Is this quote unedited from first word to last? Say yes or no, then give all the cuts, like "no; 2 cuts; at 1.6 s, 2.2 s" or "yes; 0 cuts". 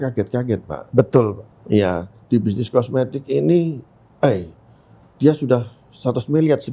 yes; 0 cuts